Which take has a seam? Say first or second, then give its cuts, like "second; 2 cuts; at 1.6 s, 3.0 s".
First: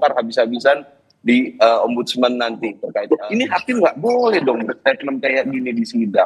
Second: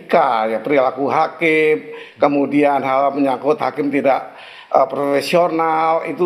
first; 1 cut; at 2.9 s